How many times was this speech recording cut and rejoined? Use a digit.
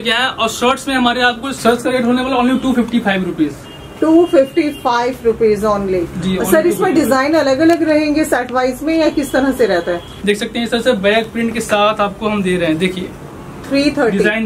2